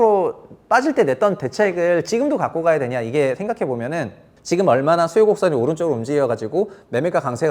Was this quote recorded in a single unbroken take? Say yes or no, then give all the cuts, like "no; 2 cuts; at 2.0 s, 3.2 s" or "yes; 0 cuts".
yes; 0 cuts